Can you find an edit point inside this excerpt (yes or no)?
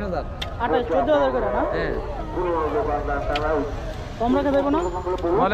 no